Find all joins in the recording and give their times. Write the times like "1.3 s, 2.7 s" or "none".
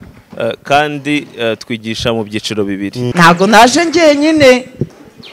3.1 s